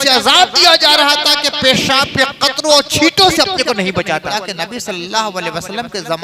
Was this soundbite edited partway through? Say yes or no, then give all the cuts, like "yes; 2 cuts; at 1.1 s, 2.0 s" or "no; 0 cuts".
yes; 1 cut; at 4.3 s